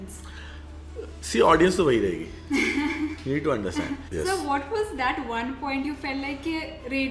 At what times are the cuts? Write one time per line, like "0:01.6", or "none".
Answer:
0:04.0